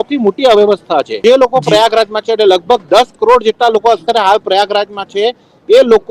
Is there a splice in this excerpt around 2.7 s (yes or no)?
no